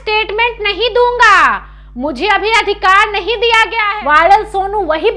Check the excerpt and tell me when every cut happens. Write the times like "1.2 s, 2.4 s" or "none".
3.8 s